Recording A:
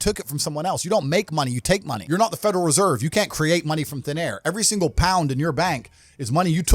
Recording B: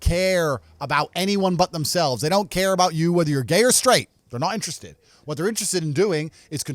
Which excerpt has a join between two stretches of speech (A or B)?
A